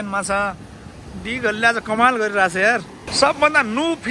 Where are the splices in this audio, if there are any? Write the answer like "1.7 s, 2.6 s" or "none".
3.0 s